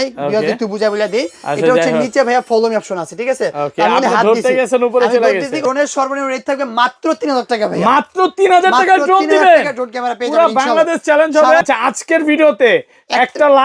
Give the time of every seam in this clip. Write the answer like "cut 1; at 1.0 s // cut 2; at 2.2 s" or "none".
cut 1; at 5.6 s // cut 2; at 11.6 s